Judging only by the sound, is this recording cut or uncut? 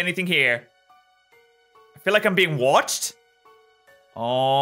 uncut